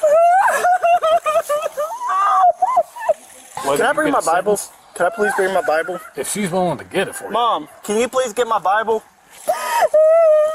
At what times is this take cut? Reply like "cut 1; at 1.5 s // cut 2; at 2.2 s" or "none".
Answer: none